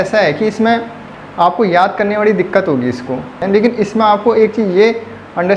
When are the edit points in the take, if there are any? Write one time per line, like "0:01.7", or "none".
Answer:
0:03.4

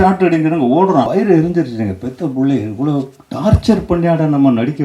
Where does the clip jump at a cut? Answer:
0:01.1

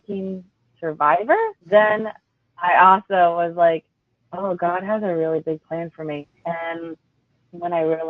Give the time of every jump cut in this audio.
0:01.6
0:06.2

